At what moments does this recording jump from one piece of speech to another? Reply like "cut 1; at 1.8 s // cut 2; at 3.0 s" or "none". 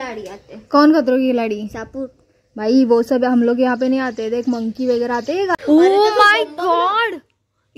cut 1; at 5.5 s